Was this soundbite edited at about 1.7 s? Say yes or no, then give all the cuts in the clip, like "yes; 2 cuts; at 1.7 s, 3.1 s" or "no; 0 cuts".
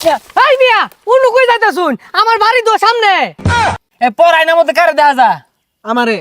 no; 1 cut; at 3.4 s